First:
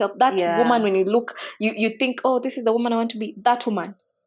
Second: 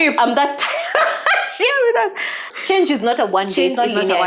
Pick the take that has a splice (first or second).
second